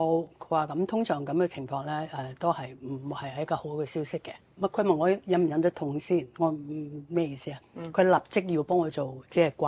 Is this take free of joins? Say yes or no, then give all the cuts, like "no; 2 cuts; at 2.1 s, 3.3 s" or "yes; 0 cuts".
no; 1 cut; at 4.4 s